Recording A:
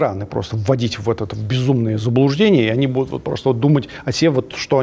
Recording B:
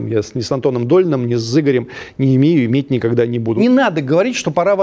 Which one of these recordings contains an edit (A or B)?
B